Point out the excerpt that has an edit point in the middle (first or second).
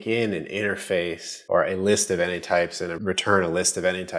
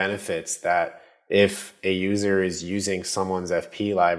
first